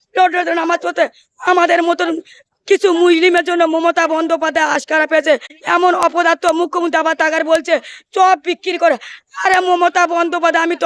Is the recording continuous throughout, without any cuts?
no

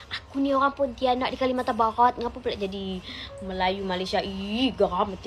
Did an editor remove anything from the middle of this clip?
no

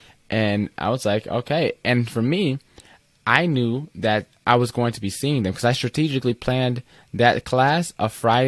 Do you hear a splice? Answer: no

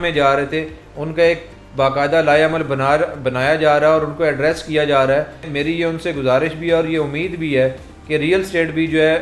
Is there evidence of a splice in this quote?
no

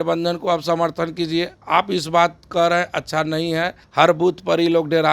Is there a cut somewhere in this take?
yes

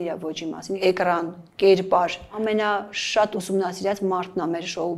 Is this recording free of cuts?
no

